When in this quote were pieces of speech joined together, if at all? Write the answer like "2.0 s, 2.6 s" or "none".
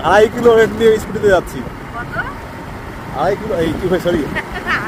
none